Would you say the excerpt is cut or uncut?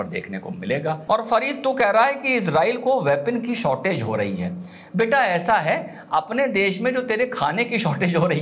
cut